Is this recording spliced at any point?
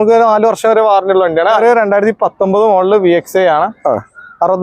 yes; 1 cut; at 1.6 s

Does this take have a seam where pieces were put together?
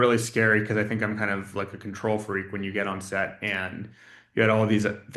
no; 0 cuts

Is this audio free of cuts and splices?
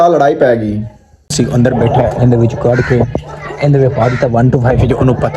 no; 1 cut; at 1.3 s

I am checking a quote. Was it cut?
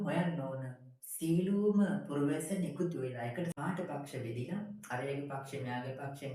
yes; 1 cut; at 3.5 s

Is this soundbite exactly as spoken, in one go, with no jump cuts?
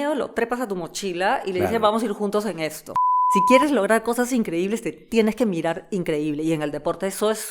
no; 1 cut; at 3.3 s

